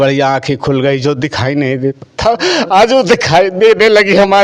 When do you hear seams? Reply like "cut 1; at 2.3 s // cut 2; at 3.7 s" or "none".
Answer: none